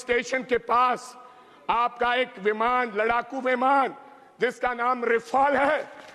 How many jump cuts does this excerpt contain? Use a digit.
0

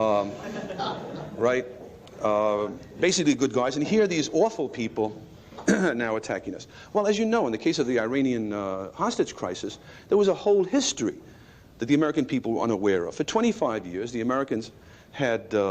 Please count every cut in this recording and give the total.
1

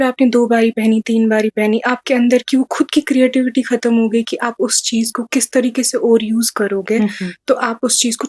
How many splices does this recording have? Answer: 0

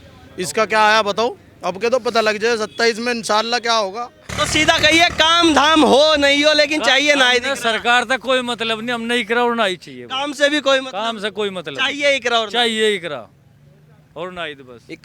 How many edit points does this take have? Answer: 1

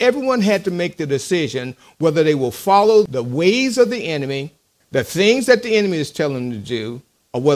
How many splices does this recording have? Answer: 1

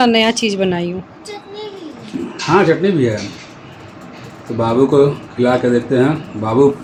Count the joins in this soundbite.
0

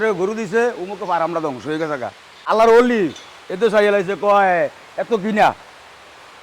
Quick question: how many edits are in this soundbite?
1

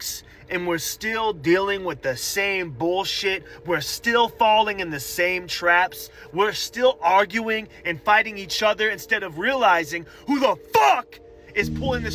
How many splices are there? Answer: 0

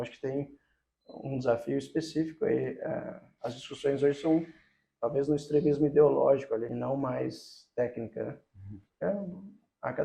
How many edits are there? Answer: 1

